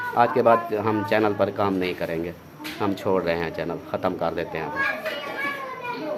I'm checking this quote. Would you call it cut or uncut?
uncut